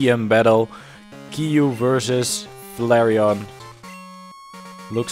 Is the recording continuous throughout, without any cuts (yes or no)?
no